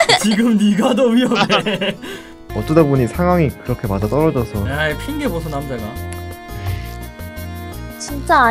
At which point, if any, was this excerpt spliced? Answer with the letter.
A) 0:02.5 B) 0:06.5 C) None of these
A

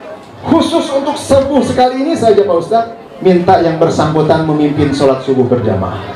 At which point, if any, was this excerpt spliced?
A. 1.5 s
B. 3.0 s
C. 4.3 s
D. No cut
B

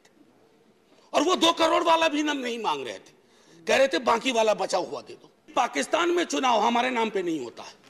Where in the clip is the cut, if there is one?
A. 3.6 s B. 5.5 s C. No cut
B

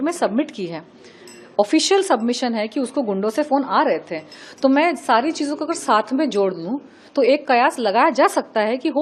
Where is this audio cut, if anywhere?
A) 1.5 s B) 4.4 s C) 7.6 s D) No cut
D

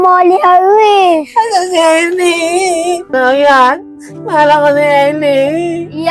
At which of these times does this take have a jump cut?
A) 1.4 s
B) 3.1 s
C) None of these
B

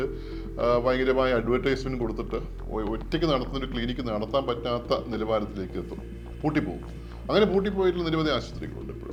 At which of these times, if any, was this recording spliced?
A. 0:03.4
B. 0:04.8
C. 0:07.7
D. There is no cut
D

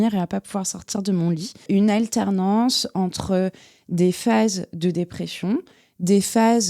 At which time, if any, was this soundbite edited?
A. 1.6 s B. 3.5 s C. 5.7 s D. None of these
A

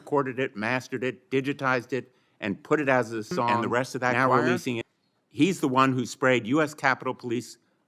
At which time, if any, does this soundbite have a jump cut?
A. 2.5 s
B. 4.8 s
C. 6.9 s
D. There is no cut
B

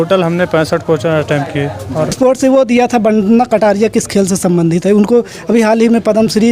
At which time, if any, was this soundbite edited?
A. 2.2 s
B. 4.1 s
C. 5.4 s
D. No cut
A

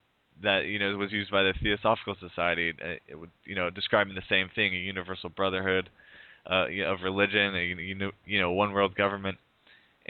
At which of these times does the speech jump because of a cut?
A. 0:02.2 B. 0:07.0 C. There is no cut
B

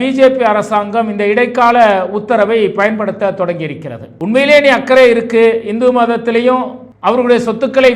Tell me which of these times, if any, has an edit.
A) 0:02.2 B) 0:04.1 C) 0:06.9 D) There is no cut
B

